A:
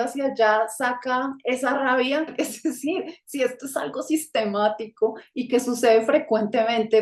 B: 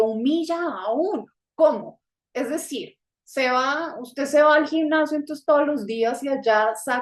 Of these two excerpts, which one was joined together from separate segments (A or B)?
A